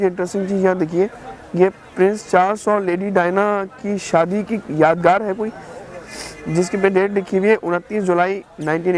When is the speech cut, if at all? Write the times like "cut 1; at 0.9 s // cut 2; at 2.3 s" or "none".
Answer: none